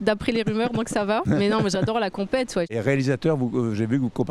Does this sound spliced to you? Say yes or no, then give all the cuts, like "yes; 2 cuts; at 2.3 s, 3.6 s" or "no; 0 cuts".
yes; 2 cuts; at 1.2 s, 2.7 s